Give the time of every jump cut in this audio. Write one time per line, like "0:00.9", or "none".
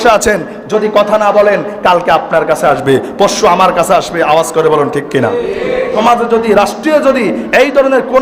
0:05.9